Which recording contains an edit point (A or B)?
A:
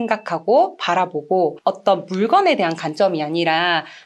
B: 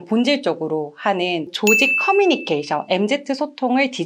B